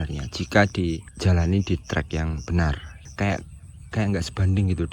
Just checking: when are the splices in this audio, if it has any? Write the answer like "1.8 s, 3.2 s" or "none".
1.1 s, 2.9 s